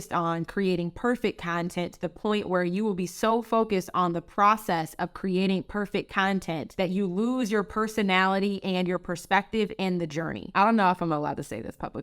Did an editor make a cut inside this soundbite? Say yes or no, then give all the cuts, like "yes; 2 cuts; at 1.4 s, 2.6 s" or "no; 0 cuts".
yes; 1 cut; at 10.5 s